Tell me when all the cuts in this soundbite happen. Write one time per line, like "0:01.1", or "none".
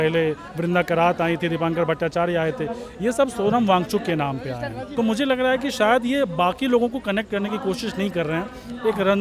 0:04.9